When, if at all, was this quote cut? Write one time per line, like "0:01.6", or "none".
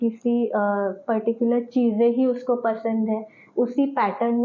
none

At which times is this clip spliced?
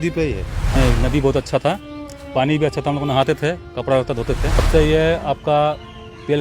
0:00.8
0:04.7

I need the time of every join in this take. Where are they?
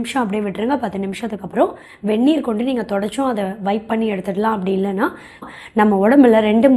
0:05.5

